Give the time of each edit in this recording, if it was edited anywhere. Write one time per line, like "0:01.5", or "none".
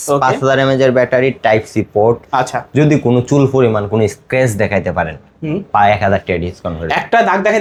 none

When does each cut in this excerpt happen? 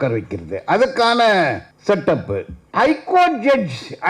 0:01.7
0:02.6

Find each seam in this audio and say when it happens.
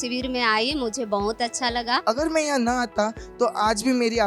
0:02.0

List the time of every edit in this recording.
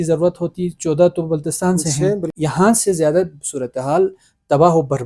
0:02.3

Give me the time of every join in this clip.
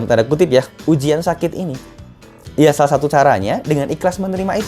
none

